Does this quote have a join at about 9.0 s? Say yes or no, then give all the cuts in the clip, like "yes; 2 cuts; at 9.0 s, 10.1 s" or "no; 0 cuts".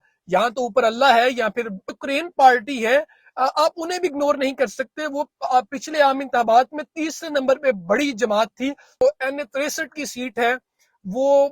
yes; 2 cuts; at 1.9 s, 9.0 s